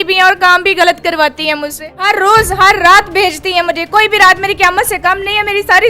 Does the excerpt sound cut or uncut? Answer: cut